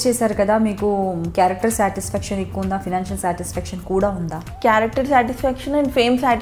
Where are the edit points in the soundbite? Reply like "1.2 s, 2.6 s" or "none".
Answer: 4.4 s